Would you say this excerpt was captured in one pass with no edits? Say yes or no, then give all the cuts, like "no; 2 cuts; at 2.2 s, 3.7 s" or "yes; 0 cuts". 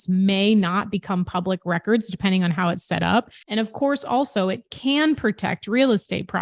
no; 1 cut; at 3.4 s